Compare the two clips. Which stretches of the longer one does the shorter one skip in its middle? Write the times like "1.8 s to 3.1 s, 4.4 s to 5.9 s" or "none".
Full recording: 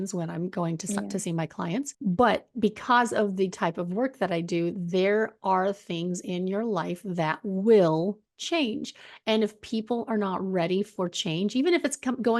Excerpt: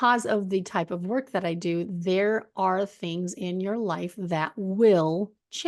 none